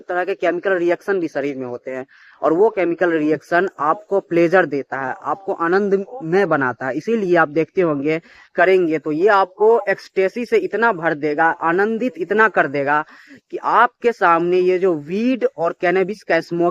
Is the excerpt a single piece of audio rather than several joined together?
no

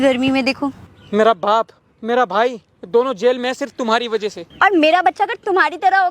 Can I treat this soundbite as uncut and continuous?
no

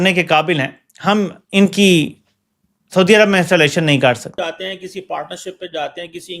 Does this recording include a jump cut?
yes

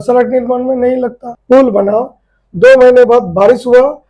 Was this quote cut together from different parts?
yes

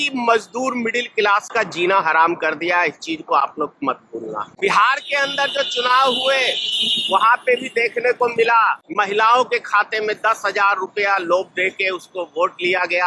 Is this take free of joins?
no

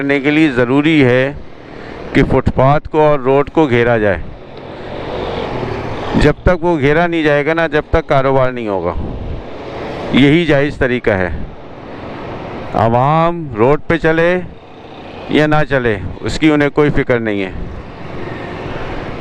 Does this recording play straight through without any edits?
yes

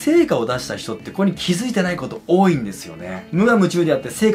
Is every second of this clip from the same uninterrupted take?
yes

